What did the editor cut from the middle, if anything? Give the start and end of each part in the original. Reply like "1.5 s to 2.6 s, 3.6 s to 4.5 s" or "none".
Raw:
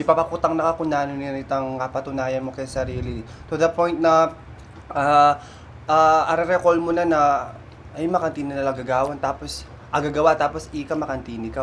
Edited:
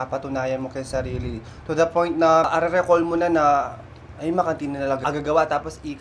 4.3 s to 6.3 s, 8.8 s to 9.9 s

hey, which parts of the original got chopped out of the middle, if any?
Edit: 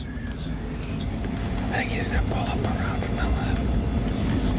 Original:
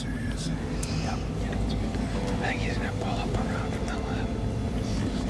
1.0 s to 1.7 s

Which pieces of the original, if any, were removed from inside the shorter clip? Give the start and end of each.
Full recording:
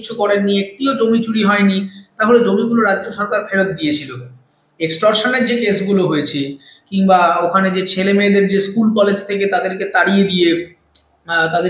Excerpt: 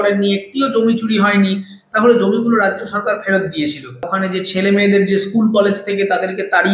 4.4 s to 7.6 s

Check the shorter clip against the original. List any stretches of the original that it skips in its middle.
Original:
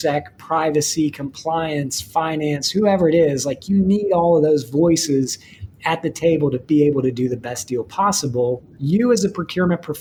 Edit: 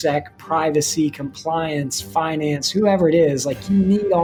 none

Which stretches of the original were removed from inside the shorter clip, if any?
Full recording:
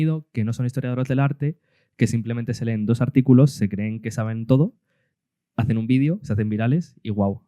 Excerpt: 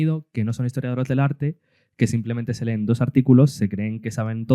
none

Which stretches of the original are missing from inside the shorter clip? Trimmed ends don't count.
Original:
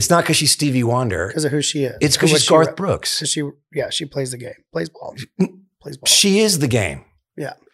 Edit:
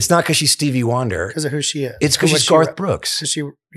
none

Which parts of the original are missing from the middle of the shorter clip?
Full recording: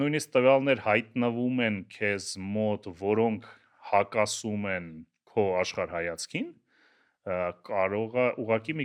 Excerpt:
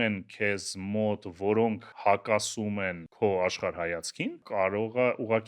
3.5 s to 3.7 s, 4.9 s to 5.2 s, 6.6 s to 7.6 s

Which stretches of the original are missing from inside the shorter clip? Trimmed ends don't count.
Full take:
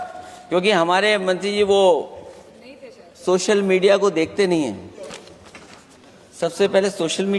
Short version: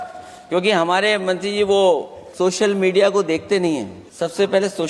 2.2 s to 3.1 s, 4.9 s to 6.2 s

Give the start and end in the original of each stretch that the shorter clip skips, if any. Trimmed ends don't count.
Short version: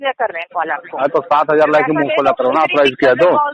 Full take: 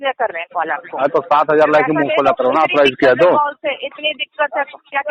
none

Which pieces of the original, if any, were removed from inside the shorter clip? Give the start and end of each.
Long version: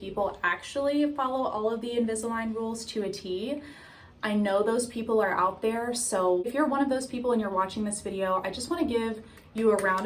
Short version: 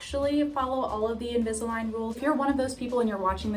2.8 s to 6.5 s

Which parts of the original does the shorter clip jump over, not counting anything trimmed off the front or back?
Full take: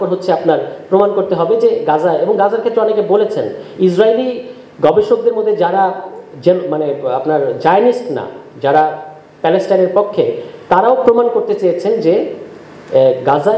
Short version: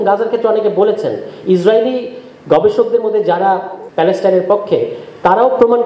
6.1 s to 9.2 s

